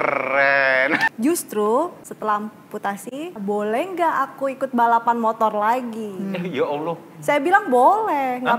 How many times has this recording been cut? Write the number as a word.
three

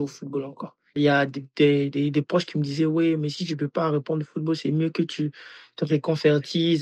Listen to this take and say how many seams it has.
one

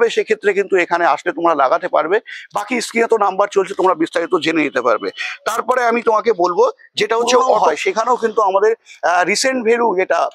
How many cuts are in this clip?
one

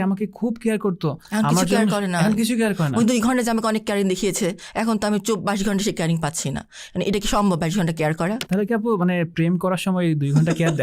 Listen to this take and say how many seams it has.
zero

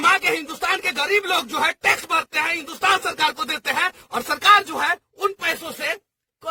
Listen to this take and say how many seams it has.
zero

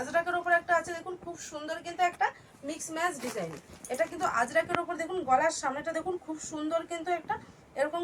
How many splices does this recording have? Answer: zero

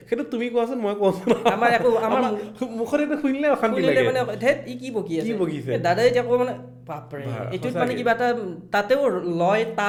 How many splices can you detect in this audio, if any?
zero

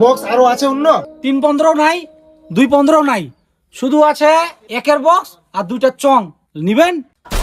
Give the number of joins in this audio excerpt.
three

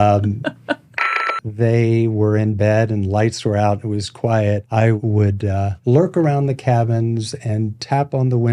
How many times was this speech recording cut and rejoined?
one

